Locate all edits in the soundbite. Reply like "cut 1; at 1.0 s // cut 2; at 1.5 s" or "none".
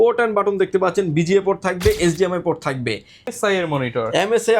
cut 1; at 3.3 s